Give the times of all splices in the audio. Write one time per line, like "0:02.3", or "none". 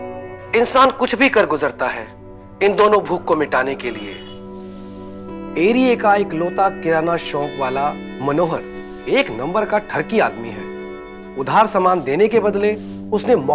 none